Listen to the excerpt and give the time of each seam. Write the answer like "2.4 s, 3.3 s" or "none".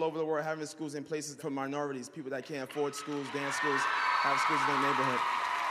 4.5 s